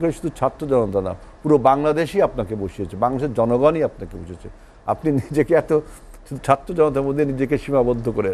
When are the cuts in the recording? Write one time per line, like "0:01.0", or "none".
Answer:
none